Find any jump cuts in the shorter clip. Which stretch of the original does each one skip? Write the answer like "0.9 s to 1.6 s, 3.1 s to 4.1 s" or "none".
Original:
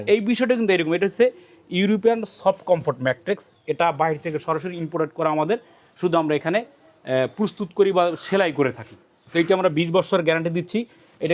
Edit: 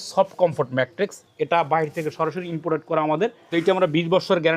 5.7 s to 9.2 s